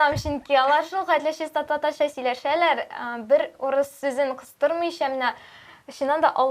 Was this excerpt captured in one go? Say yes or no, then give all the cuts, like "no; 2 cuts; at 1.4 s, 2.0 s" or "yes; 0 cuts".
yes; 0 cuts